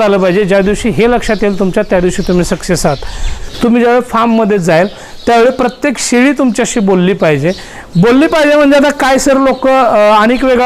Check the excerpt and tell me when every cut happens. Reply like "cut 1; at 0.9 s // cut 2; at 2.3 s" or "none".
cut 1; at 3.4 s